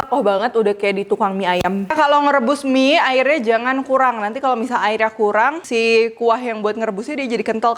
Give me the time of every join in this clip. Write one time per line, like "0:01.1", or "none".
0:01.9
0:05.6